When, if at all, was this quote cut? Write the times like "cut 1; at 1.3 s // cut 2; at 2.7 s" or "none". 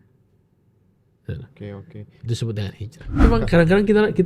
cut 1; at 3.2 s